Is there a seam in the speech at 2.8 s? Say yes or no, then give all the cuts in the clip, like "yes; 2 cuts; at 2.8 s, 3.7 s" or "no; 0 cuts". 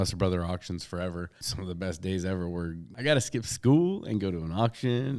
yes; 2 cuts; at 1.5 s, 2.8 s